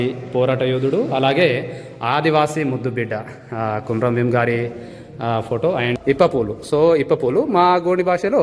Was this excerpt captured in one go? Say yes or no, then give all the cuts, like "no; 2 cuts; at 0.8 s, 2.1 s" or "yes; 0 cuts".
no; 1 cut; at 6.0 s